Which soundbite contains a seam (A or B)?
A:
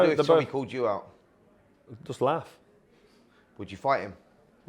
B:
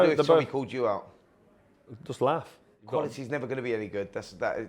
B